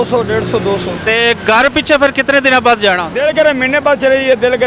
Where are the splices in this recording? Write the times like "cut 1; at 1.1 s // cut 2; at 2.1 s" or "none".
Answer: cut 1; at 0.9 s // cut 2; at 3.1 s